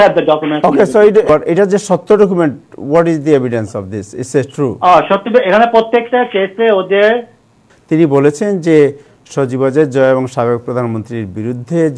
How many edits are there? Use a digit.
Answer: 2